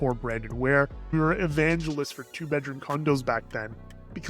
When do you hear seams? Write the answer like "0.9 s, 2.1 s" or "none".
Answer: 1.1 s